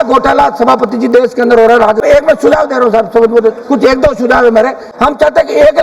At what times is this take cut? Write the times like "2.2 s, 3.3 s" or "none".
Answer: 2.0 s, 4.9 s